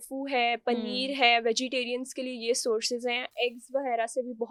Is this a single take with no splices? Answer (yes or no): yes